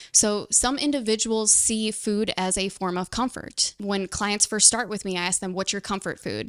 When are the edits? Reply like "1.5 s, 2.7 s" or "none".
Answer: 3.8 s